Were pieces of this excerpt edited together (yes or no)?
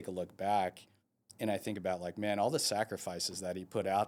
no